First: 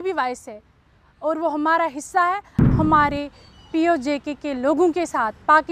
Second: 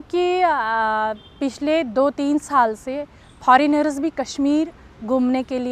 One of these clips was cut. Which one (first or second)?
first